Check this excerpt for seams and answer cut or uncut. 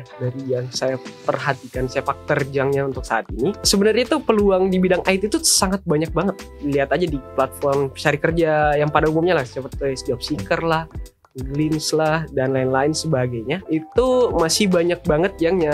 cut